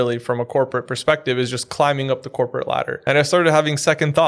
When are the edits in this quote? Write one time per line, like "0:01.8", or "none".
0:02.9